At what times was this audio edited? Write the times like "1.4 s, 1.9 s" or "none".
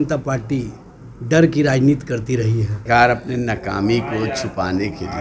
2.8 s